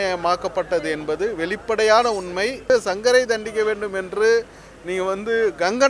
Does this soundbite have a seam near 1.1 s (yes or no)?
no